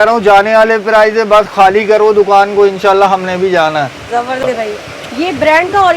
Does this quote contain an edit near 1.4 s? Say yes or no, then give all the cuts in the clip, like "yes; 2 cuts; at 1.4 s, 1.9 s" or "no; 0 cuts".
no; 1 cut; at 4.4 s